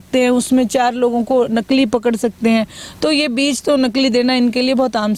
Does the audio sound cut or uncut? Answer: uncut